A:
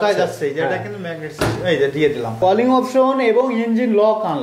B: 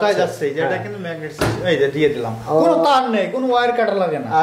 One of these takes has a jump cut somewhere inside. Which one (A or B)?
A